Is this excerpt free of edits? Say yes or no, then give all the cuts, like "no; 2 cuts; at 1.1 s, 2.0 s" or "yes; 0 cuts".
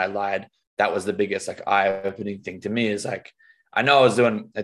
yes; 0 cuts